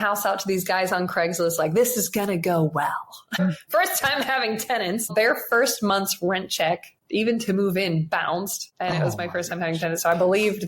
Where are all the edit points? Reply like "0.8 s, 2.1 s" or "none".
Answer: 3.4 s, 5.1 s, 6.9 s, 8.6 s

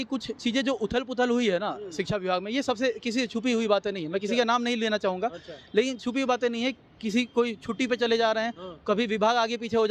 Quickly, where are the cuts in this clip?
none

